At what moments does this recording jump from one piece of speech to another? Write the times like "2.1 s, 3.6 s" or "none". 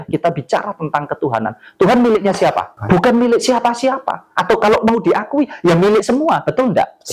2.8 s